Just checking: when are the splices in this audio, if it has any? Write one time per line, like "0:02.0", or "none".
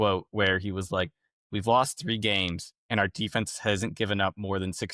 none